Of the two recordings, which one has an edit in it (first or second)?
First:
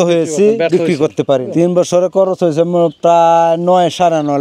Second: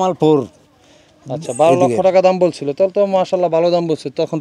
first